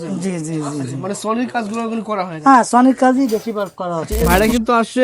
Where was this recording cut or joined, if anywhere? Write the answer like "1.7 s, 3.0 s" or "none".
4.1 s

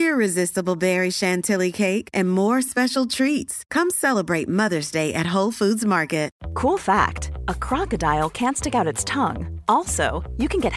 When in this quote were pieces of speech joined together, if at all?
6.4 s

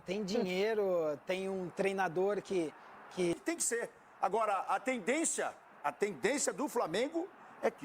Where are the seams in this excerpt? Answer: 3.3 s

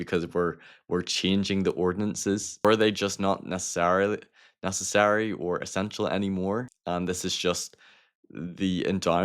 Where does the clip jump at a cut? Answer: 2.6 s, 6.7 s

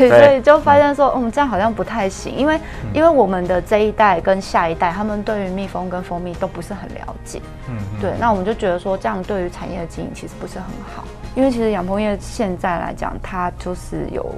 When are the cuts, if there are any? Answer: 11.2 s

